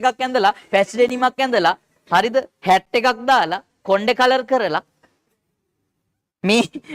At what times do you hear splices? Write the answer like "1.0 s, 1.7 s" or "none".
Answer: none